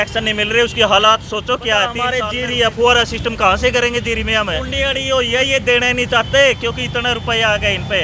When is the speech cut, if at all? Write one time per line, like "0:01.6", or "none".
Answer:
0:02.0
0:04.7